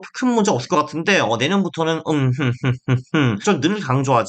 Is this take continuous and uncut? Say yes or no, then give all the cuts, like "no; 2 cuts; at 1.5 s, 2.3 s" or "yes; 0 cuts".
no; 1 cut; at 3.4 s